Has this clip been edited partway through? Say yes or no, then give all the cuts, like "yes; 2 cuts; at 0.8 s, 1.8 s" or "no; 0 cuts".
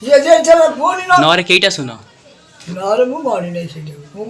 yes; 1 cut; at 1.2 s